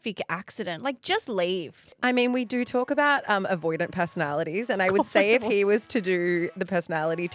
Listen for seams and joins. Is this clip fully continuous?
no; 1 cut; at 1.8 s

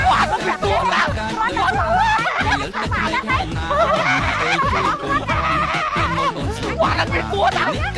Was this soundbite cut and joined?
no; 0 cuts

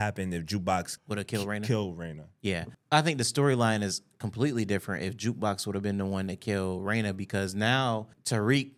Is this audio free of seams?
yes; 0 cuts

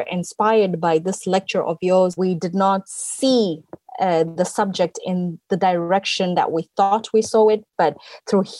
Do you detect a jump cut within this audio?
yes; 1 cut; at 2.5 s

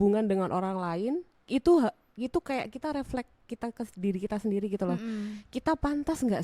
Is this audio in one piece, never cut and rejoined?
yes; 0 cuts

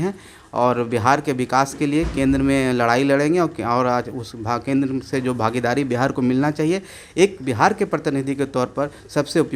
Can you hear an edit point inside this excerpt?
no; 0 cuts

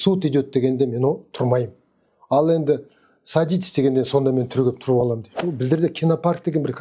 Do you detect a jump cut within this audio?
yes; 1 cut; at 5.4 s

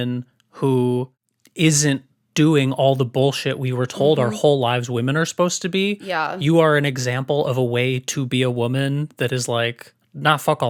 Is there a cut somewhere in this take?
no; 0 cuts

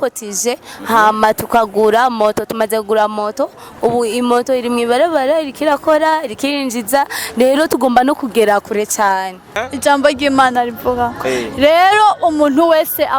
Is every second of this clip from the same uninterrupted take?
no; 1 cut; at 9.6 s

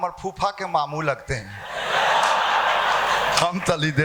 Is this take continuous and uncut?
yes; 0 cuts

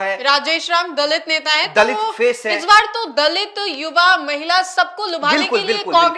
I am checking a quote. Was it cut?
no; 0 cuts

